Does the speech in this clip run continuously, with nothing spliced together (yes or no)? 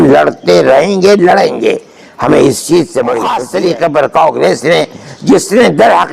no